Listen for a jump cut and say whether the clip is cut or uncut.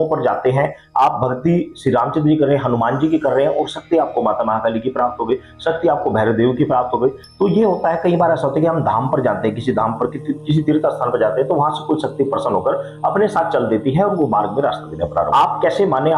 cut